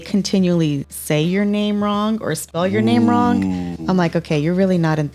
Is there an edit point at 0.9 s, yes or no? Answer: yes